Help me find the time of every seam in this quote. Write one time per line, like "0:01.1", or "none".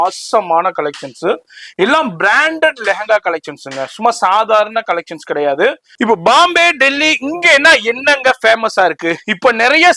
0:05.9